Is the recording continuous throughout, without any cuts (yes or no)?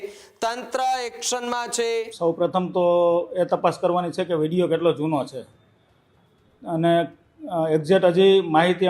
no